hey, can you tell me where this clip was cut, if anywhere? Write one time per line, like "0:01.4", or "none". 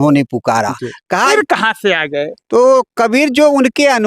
0:01.3